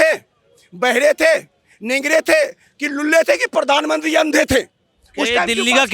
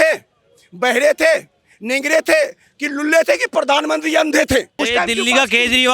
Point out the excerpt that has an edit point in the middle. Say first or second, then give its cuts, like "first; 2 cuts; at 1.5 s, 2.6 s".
second; 1 cut; at 4.7 s